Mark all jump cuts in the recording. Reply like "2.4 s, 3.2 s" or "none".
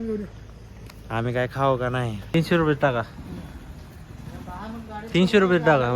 2.2 s